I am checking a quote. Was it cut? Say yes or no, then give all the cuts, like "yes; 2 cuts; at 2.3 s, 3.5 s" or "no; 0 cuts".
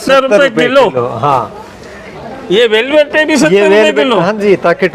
no; 0 cuts